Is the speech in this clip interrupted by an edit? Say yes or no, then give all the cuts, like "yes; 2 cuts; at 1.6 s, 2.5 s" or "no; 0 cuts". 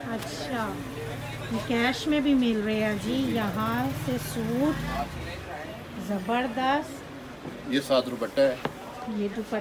no; 0 cuts